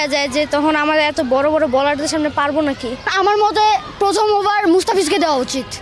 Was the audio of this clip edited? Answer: yes; 1 cut; at 3.1 s

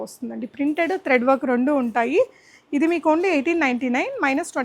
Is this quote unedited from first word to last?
yes; 0 cuts

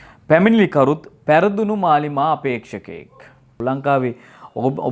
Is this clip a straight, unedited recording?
no; 1 cut; at 3.6 s

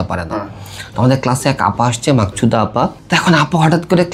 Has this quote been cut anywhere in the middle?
yes; 1 cut; at 3.0 s

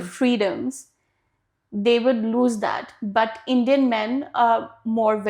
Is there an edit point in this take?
no; 0 cuts

